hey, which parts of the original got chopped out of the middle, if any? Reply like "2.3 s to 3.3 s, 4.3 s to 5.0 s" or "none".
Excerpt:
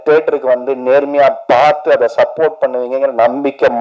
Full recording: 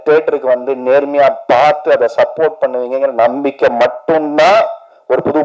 none